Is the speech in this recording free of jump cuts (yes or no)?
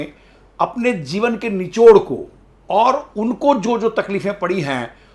yes